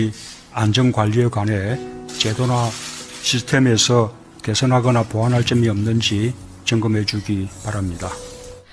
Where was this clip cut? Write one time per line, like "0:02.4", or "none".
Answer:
none